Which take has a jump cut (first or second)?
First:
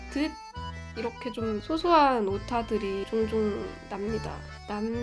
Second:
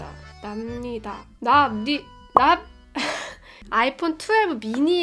second